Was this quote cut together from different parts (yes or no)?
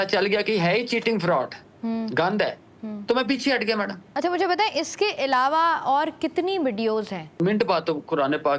yes